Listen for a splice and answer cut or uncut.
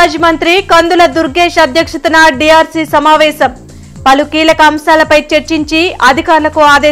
uncut